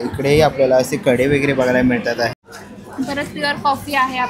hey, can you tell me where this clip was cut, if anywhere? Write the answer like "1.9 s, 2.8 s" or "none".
2.4 s